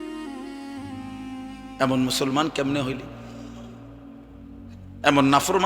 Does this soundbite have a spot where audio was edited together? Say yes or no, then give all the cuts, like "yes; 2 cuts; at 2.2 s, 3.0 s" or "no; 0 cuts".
yes; 3 cuts; at 1.0 s, 3.0 s, 4.9 s